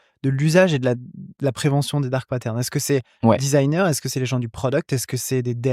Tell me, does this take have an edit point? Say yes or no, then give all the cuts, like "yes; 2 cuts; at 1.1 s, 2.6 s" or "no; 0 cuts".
no; 0 cuts